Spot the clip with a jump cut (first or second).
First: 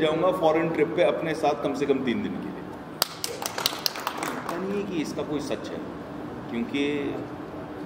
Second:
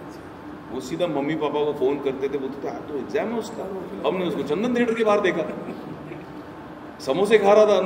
first